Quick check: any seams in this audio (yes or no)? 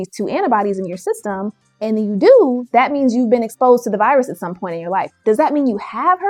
no